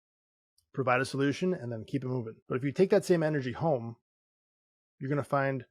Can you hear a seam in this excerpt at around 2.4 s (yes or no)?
yes